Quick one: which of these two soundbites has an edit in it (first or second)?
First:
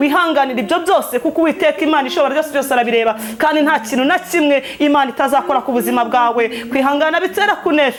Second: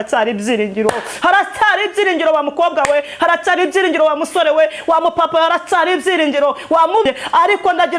second